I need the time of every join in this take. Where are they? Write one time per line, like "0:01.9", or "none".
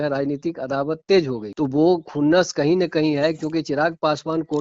0:01.4